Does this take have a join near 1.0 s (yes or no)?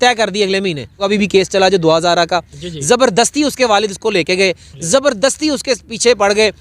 yes